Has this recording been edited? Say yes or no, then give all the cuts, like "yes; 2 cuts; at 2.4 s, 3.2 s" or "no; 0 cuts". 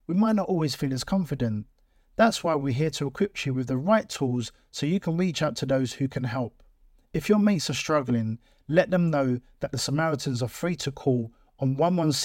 no; 0 cuts